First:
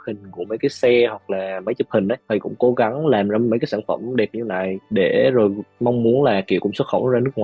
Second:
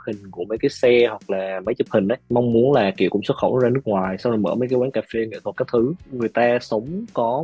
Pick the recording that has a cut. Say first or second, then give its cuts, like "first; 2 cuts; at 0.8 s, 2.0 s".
second; 2 cuts; at 2.2 s, 6.0 s